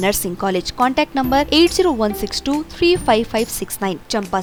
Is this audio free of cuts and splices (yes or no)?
yes